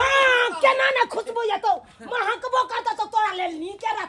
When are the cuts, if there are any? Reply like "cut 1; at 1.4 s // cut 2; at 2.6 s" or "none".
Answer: none